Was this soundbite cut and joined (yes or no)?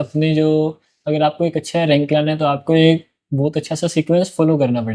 no